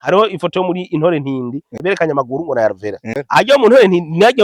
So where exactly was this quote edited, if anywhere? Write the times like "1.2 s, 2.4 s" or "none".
1.7 s, 3.2 s